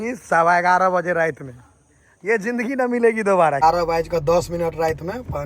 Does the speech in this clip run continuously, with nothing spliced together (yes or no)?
no